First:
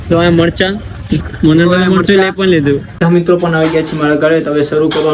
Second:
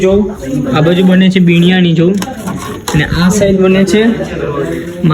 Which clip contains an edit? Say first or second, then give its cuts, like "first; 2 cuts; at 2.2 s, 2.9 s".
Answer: first; 1 cut; at 3.0 s